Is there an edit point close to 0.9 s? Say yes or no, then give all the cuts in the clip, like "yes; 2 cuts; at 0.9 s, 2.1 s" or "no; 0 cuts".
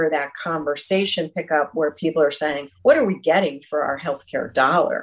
no; 1 cut; at 2.7 s